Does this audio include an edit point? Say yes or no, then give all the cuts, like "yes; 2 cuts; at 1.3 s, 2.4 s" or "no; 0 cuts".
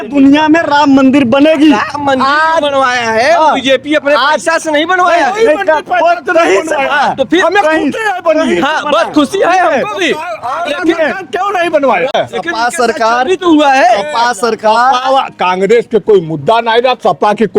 yes; 1 cut; at 12.1 s